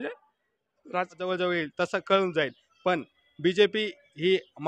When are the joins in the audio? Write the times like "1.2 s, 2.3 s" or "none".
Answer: 1.2 s